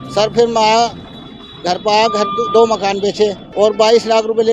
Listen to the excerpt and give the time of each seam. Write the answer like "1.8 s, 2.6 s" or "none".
3.4 s